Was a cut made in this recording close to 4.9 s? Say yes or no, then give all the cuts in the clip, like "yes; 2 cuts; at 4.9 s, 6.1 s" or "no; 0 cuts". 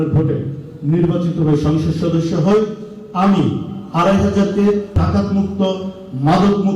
yes; 1 cut; at 4.9 s